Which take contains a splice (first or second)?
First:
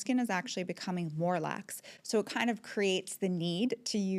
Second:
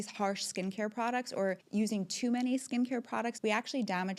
second